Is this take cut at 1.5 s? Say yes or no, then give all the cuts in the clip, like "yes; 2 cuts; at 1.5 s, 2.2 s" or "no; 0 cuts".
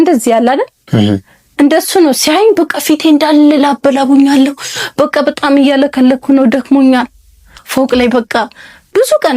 no; 1 cut; at 7.5 s